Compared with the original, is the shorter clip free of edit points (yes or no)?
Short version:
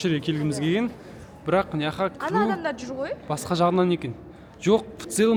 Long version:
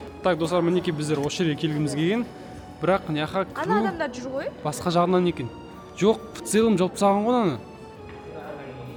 yes